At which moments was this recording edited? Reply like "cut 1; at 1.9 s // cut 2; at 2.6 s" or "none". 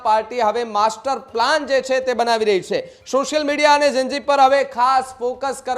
none